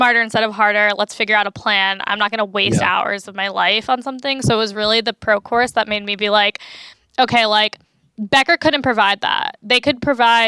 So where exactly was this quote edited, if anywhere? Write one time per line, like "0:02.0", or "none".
none